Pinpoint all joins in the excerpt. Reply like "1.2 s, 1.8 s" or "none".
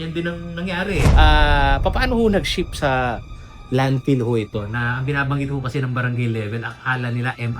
1.1 s